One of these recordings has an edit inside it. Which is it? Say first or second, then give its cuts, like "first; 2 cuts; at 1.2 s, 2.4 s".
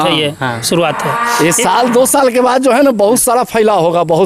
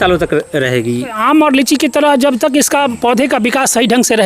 second; 1 cut; at 1.2 s